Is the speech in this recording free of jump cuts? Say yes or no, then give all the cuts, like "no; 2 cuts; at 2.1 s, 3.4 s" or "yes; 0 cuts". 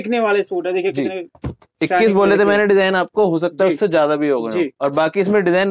yes; 0 cuts